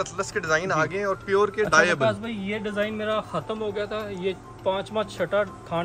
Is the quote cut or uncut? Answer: uncut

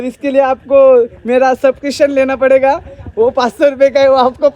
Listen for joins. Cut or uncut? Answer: uncut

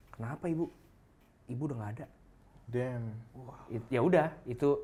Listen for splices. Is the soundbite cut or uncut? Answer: uncut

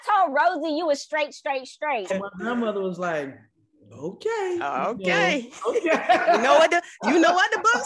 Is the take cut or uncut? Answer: cut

